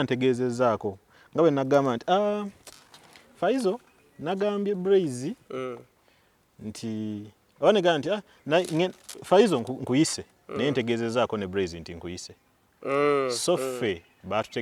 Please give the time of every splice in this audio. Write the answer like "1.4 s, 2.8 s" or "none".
none